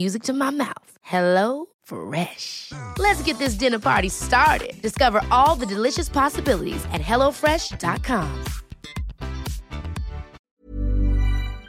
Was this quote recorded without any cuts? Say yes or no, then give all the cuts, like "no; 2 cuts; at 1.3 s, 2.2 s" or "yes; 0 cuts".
no; 1 cut; at 10.4 s